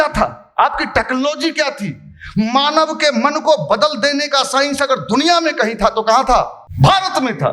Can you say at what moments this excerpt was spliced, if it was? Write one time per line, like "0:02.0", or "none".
0:06.6